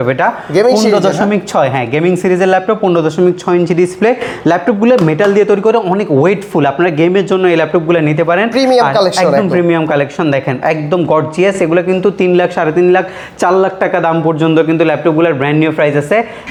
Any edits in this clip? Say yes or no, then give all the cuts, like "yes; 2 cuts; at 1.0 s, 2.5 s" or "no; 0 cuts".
no; 0 cuts